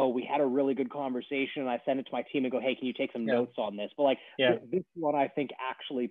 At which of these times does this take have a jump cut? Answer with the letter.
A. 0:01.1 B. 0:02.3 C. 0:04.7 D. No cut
D